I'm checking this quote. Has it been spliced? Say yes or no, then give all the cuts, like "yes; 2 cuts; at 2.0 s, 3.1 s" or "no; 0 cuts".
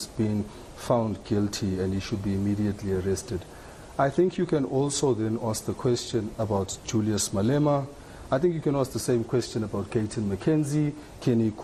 no; 0 cuts